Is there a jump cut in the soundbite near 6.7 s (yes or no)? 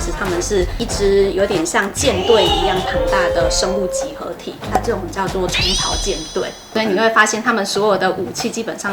yes